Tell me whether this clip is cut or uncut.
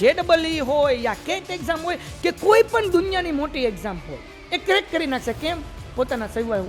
uncut